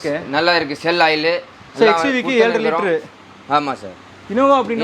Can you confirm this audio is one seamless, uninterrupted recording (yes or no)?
yes